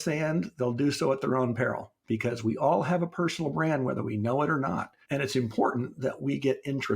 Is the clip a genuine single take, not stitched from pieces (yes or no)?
no